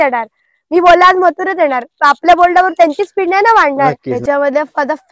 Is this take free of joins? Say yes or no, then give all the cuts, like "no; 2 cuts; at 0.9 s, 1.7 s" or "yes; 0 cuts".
no; 1 cut; at 4.1 s